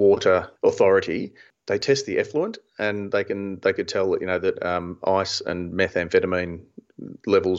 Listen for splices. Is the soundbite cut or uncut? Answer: cut